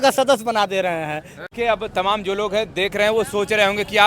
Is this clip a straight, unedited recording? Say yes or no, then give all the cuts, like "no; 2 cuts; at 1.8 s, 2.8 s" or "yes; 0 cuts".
no; 1 cut; at 1.4 s